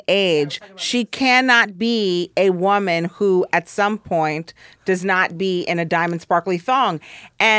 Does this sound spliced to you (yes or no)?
no